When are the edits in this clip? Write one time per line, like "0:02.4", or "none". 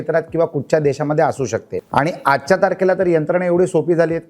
0:01.8